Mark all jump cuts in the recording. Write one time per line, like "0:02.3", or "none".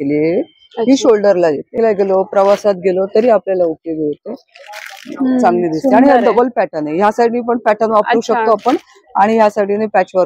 0:01.7

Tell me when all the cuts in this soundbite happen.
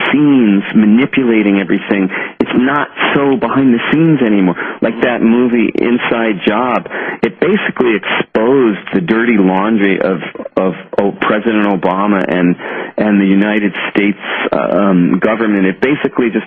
0:14.0

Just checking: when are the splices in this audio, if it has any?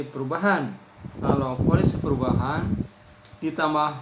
0:01.2

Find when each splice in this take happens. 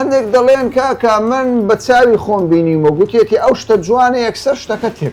none

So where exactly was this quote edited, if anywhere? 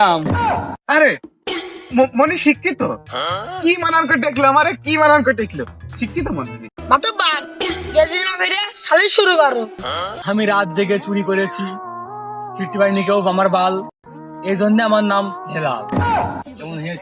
0:09.8

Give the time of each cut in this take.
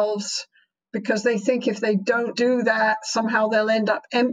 0:02.3

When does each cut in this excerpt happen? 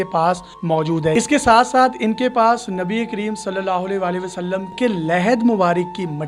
0:01.1
0:04.7

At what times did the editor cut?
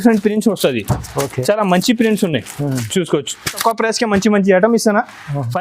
0:03.6

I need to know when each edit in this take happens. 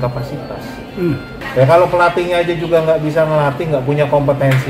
0:01.4

